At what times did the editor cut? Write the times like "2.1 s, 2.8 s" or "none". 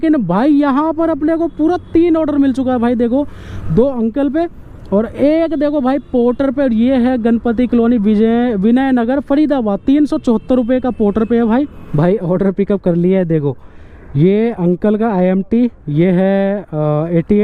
11.9 s